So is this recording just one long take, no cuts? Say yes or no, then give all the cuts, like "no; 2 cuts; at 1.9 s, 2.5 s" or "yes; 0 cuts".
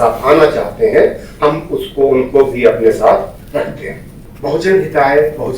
no; 1 cut; at 4.3 s